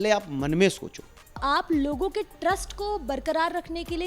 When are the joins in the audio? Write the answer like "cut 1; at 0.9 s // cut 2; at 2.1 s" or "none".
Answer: cut 1; at 1.4 s